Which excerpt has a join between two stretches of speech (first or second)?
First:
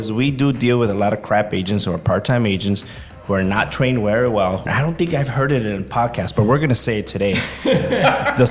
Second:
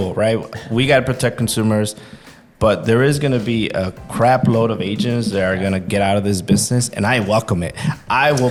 first